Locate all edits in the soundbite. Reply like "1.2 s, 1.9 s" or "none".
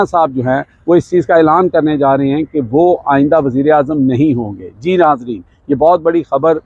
none